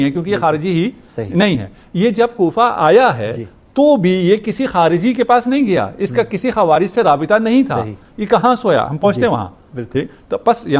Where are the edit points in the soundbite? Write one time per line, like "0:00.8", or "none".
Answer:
none